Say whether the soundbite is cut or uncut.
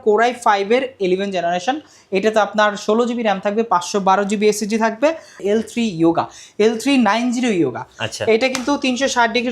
cut